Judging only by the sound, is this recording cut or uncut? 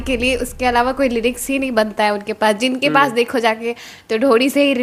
uncut